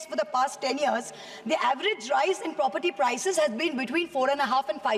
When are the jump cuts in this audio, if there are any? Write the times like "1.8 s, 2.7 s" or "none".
none